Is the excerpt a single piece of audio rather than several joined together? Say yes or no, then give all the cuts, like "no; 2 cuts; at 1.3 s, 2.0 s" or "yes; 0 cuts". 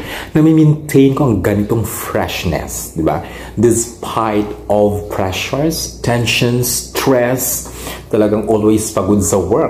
yes; 0 cuts